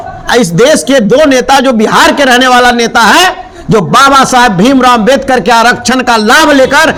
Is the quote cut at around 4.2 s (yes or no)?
no